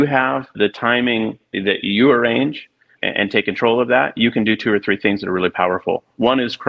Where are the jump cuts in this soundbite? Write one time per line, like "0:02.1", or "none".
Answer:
0:01.0
0:03.0